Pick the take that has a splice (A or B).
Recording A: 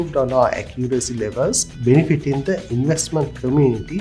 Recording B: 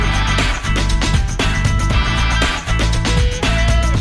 A